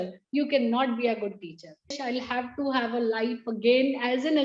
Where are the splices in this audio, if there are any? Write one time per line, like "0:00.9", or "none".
0:02.0